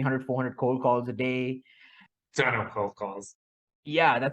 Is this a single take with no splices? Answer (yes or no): no